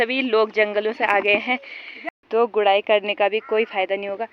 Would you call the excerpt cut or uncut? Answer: cut